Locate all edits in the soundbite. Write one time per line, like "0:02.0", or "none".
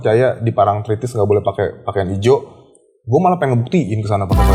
none